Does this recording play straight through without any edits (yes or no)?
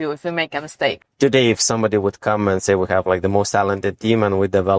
no